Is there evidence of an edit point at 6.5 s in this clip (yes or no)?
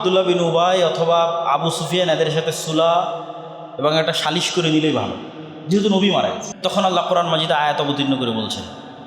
yes